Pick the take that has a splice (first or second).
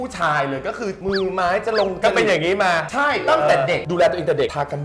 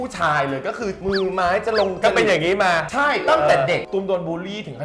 second